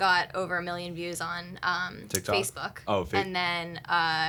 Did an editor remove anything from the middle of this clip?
no; 0 cuts

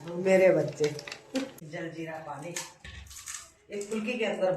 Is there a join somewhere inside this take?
yes; 1 cut; at 1.6 s

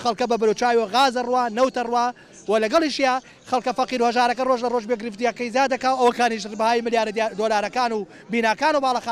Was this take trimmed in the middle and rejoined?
no; 0 cuts

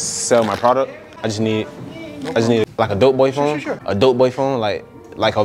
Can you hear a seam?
yes; 3 cuts; at 1.0 s, 2.7 s, 3.8 s

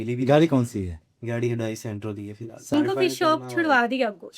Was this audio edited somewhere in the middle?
yes; 1 cut; at 2.7 s

